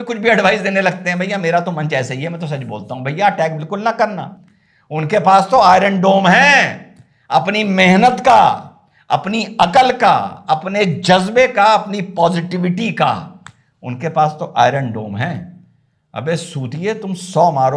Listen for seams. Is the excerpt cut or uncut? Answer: uncut